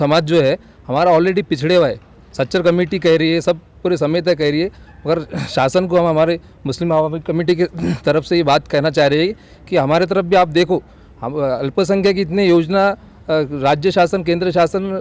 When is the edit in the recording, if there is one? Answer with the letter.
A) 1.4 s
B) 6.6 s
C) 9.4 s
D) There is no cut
D